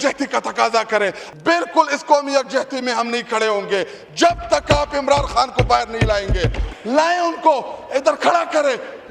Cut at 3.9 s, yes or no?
no